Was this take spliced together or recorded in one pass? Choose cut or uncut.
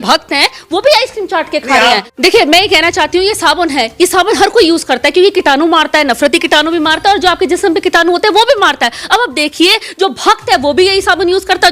cut